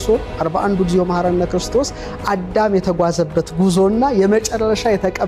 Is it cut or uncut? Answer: uncut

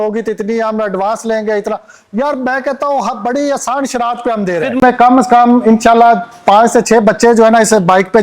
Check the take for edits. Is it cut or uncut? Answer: cut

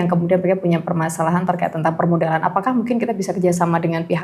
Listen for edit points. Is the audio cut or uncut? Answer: uncut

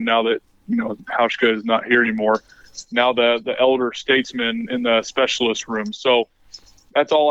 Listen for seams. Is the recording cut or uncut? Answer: uncut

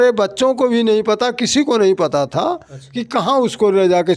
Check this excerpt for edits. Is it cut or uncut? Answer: uncut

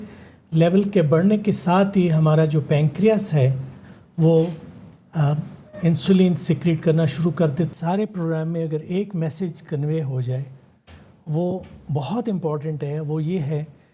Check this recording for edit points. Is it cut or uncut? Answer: cut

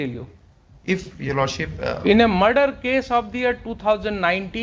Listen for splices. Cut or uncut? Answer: uncut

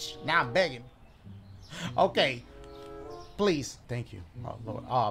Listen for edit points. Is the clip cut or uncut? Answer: cut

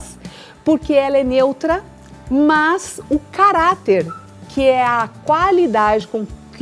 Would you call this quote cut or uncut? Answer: uncut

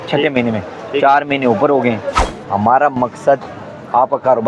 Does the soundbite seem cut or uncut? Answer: cut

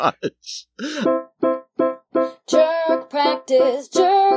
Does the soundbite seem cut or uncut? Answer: cut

